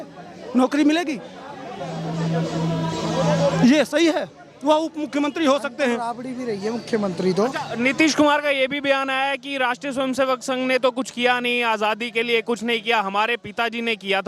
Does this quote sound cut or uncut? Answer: uncut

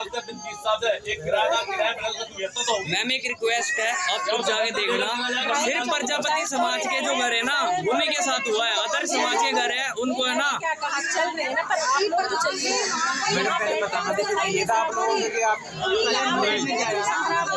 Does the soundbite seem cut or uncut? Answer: uncut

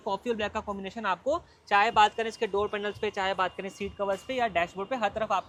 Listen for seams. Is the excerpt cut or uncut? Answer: uncut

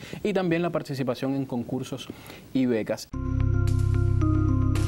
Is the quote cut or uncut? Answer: cut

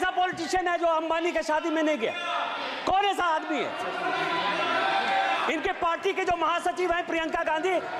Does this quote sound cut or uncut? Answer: uncut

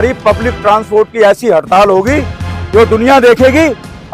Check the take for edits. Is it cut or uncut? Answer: uncut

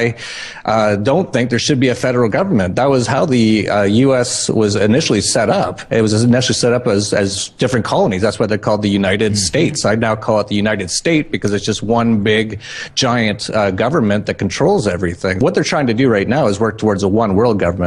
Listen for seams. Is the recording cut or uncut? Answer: cut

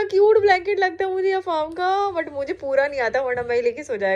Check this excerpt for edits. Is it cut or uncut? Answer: uncut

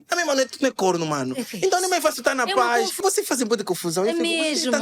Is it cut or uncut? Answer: cut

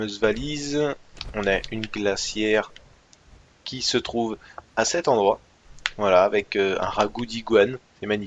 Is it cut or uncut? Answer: uncut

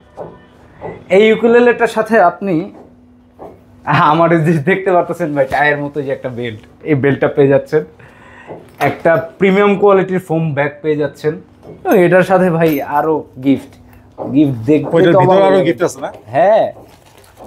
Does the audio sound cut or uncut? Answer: uncut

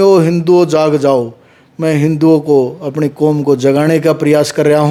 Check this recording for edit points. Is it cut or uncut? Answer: uncut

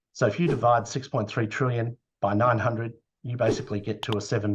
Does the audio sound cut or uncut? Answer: uncut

